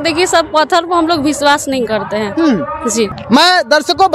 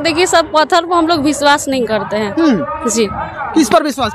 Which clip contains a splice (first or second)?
first